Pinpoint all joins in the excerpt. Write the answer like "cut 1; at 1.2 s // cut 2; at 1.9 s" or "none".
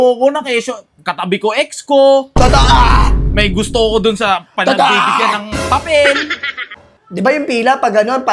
cut 1; at 6.8 s